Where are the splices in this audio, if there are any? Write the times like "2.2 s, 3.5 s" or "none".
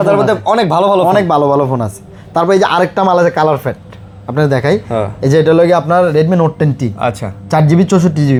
none